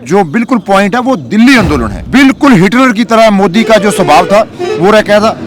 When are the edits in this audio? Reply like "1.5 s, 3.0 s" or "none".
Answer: 2.0 s